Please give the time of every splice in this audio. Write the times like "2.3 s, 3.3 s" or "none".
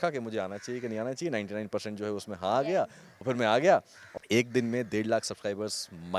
3.1 s, 4.2 s